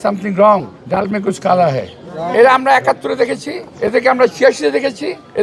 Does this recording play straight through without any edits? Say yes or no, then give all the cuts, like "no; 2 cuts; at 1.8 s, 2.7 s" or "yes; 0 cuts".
no; 1 cut; at 2.2 s